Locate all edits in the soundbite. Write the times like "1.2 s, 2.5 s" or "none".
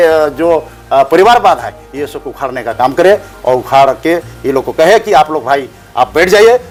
none